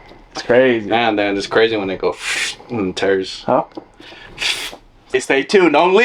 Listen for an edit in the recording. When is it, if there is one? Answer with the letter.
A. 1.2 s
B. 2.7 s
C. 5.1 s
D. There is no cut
C